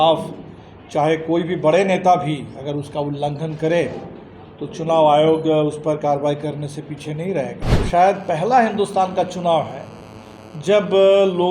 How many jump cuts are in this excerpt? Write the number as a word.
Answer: one